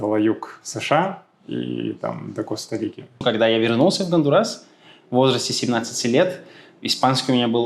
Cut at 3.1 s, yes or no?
yes